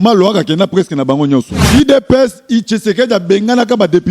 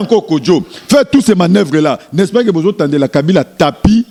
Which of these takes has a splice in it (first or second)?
first